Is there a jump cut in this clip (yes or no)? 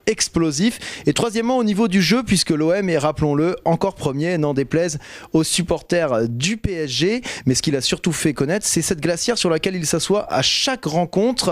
yes